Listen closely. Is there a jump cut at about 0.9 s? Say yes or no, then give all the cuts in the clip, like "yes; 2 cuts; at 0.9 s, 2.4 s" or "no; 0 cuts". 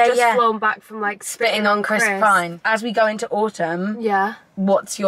no; 1 cut; at 2.6 s